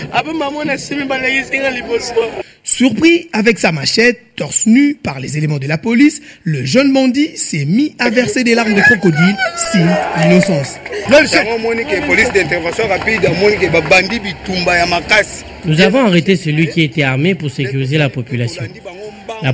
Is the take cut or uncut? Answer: cut